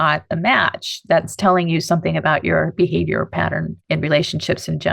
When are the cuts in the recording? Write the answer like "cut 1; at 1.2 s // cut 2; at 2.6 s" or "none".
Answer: cut 1; at 3.7 s